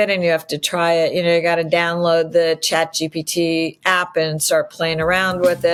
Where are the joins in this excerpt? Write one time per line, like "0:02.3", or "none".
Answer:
none